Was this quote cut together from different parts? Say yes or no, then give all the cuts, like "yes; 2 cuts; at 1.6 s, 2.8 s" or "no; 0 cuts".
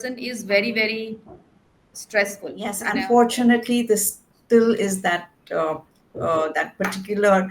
yes; 1 cut; at 2.8 s